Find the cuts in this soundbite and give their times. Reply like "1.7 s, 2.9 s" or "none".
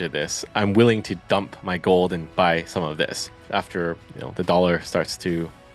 3.4 s